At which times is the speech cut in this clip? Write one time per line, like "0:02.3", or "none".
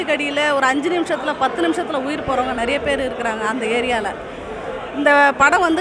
none